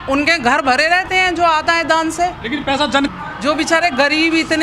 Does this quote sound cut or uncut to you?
cut